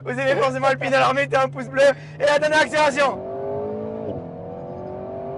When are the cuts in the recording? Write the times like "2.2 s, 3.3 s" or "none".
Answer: none